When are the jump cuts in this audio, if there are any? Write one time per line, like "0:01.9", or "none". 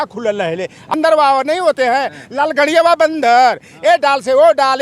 0:00.9